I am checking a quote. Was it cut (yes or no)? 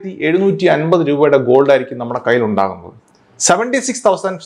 no